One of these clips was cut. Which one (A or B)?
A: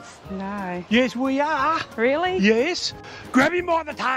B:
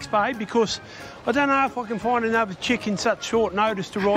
A